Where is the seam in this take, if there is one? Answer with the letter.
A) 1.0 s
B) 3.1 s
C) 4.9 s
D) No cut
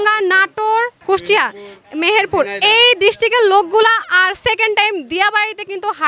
A